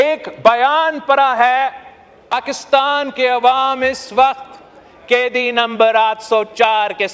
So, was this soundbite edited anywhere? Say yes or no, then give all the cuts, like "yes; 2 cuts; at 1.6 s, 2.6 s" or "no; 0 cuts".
yes; 1 cut; at 2.3 s